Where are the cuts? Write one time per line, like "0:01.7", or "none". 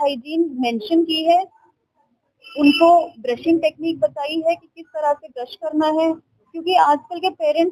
none